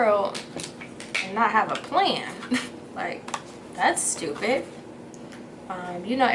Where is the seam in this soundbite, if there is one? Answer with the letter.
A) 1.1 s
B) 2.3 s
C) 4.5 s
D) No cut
D